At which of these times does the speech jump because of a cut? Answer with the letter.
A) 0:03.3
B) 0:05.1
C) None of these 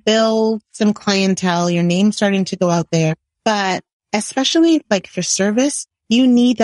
A